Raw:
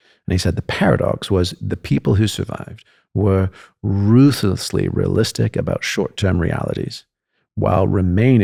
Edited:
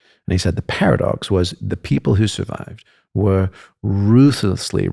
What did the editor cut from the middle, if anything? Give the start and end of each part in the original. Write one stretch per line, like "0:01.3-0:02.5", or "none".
none